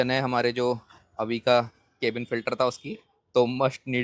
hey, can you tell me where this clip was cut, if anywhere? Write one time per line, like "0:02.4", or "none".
none